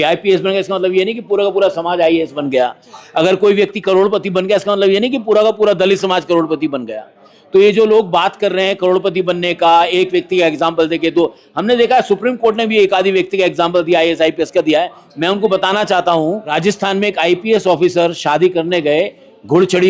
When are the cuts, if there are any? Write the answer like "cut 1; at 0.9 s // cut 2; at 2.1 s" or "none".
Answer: cut 1; at 16.5 s

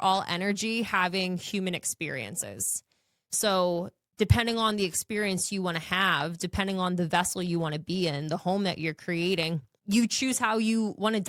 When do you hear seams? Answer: cut 1; at 9.7 s

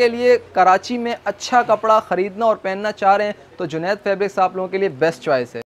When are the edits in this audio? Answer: none

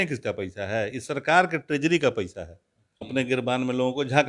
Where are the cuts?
cut 1; at 3.0 s

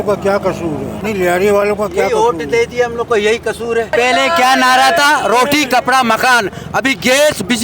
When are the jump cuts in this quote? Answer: cut 1; at 0.9 s // cut 2; at 3.9 s

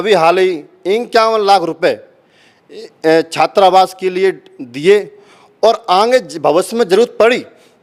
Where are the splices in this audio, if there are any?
none

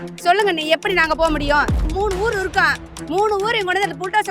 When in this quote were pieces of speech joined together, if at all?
cut 1; at 1.8 s

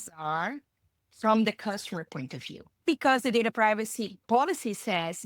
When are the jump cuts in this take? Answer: cut 1; at 2.8 s // cut 2; at 4.2 s

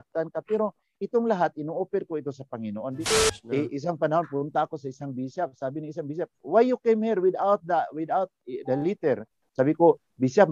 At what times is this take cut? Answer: cut 1; at 3.1 s

